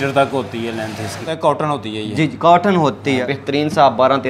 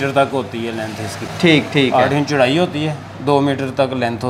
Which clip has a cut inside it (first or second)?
first